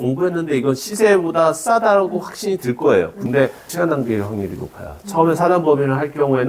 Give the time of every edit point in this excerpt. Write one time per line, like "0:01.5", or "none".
none